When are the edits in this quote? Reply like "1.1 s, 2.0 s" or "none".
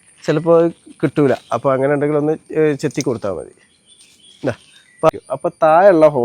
5.1 s